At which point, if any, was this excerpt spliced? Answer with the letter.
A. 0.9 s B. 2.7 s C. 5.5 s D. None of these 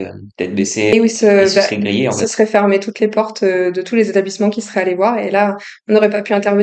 A